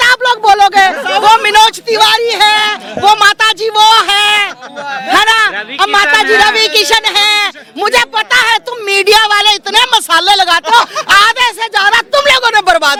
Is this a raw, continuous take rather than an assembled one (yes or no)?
yes